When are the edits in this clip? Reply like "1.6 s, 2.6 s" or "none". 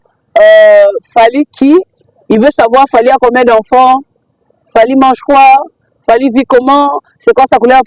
none